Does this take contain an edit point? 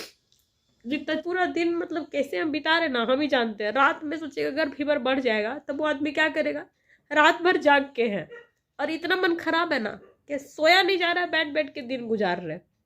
yes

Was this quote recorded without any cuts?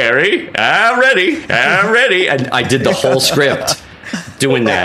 yes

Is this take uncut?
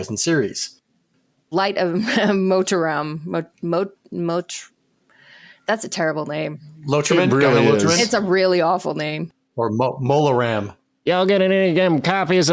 no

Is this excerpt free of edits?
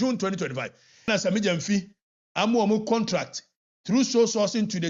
no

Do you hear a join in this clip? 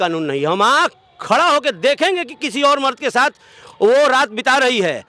no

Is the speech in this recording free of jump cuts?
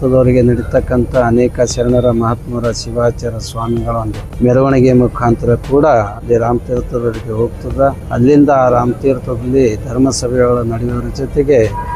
no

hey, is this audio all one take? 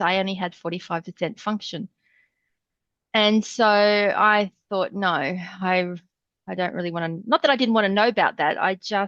yes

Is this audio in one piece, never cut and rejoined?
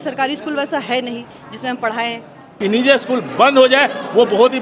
no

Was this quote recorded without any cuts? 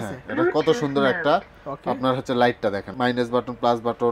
no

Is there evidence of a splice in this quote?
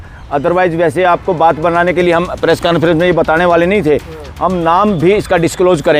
no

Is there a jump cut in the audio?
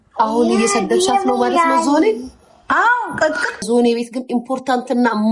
yes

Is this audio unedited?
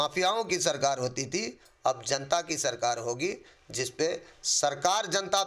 yes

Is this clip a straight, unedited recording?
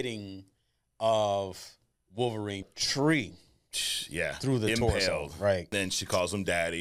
no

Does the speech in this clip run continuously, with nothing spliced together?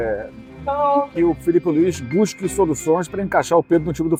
yes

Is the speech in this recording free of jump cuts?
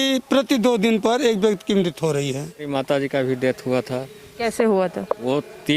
no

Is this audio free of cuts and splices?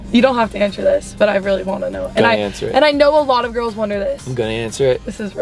yes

